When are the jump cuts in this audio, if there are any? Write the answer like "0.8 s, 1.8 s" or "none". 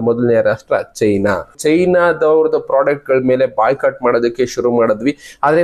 1.6 s